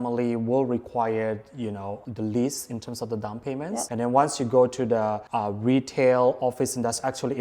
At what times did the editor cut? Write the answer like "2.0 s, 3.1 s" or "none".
2.0 s, 3.9 s, 5.2 s